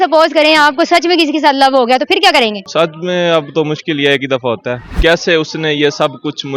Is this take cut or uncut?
cut